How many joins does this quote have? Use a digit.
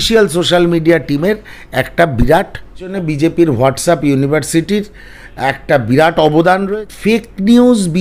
2